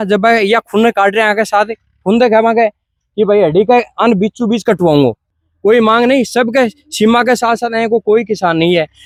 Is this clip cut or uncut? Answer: uncut